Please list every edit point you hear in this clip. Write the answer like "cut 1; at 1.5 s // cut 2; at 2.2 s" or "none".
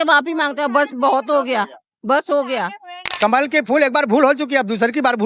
cut 1; at 3.2 s